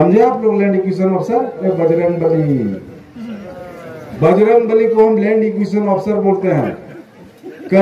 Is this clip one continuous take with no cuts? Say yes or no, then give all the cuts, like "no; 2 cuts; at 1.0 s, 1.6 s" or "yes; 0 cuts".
no; 2 cuts; at 1.5 s, 4.1 s